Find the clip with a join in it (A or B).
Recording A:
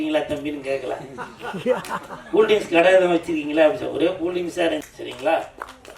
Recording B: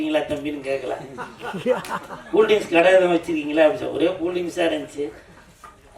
A